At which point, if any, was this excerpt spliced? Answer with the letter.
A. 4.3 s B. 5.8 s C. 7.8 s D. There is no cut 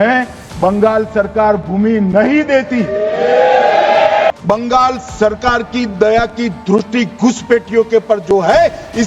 A